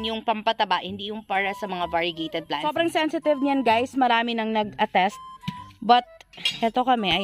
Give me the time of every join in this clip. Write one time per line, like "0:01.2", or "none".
0:02.7